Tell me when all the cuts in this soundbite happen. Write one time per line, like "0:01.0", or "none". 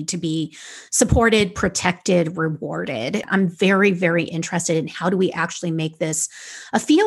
0:03.3